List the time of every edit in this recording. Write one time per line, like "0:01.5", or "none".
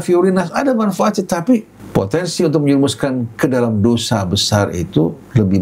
0:01.8